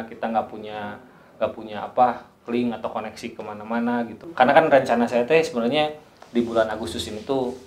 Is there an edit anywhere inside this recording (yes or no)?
yes